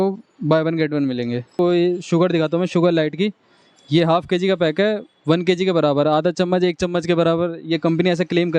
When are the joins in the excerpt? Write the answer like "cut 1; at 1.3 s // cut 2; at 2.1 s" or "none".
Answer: cut 1; at 1.4 s